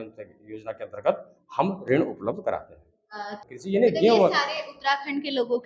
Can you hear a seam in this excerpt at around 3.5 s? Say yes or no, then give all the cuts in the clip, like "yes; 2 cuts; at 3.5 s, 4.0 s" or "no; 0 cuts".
yes; 1 cut; at 3.5 s